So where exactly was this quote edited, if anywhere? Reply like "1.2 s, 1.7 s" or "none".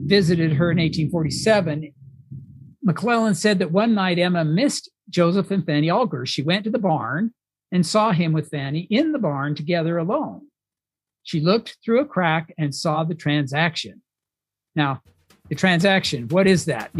13.0 s

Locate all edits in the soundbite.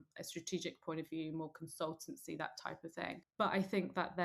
3.3 s

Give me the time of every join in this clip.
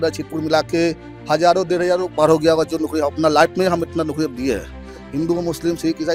none

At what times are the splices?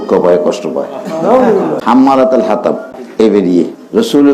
1.8 s, 3.0 s

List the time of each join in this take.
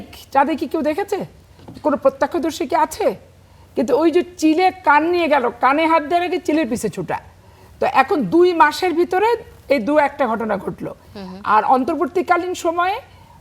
none

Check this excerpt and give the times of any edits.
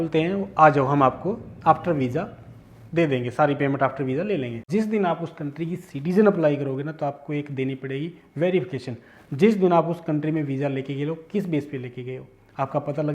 4.6 s

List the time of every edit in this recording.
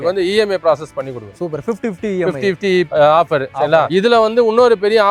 none

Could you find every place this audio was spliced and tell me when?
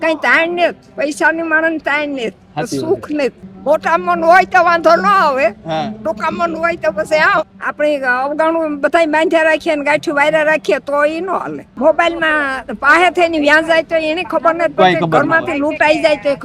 3.4 s, 7.4 s, 11.6 s

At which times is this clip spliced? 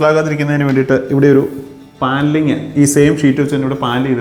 none

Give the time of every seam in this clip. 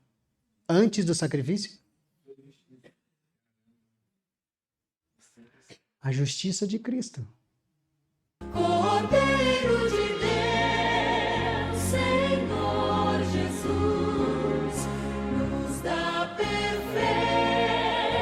8.4 s

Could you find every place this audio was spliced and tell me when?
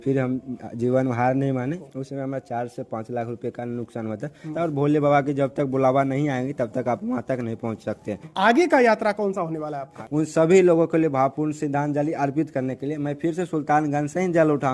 1.8 s, 4.5 s, 8.2 s, 9.9 s

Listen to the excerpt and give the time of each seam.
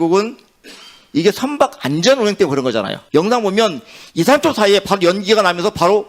3.0 s

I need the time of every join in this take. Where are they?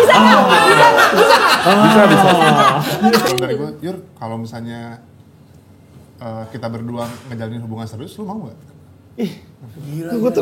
3.3 s

